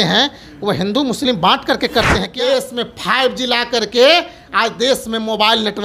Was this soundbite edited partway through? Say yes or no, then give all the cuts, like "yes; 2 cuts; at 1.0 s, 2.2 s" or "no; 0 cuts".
yes; 1 cut; at 2.3 s